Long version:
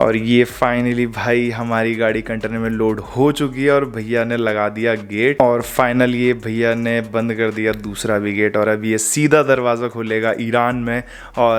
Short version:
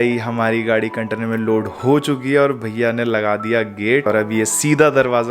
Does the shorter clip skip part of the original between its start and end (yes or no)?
yes